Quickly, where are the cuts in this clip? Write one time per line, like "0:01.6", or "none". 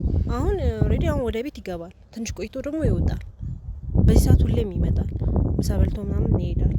none